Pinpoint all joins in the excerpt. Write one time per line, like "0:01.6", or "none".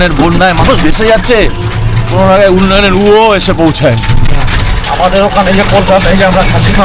0:04.9